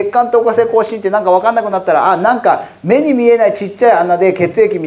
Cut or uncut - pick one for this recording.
uncut